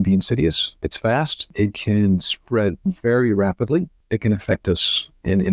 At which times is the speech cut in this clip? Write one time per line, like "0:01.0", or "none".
0:01.5
0:04.0